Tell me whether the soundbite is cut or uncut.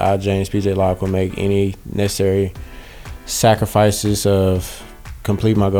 uncut